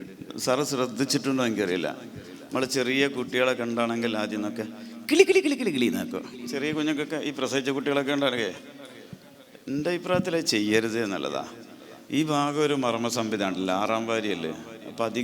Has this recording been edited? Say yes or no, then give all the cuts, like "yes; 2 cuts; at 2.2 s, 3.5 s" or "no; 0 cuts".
no; 0 cuts